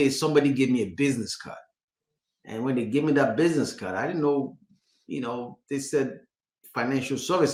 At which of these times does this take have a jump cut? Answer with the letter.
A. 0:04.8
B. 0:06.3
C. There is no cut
C